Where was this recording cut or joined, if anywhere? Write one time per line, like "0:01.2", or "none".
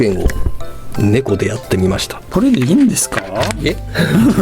0:02.1